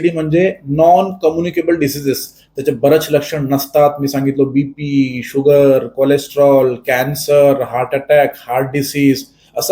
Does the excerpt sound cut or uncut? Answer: uncut